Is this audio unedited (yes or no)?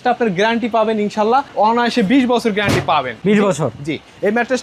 yes